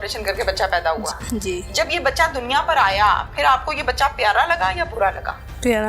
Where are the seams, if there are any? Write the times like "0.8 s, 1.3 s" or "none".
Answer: 1.1 s